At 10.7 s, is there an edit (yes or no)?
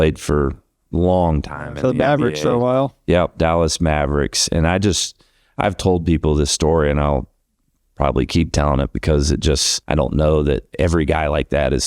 yes